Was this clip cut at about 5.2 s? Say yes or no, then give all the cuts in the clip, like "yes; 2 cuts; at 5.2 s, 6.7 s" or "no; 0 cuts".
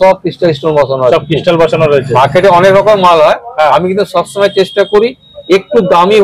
no; 0 cuts